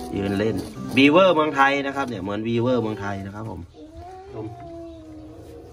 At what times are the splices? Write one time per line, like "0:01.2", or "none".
0:04.4